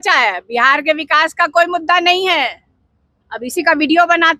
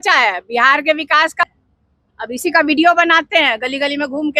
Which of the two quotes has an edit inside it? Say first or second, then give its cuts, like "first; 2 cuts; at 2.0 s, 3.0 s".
second; 1 cut; at 1.5 s